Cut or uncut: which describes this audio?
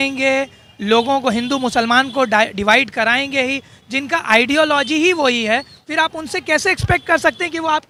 uncut